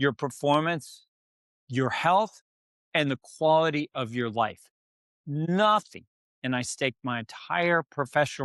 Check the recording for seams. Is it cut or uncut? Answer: uncut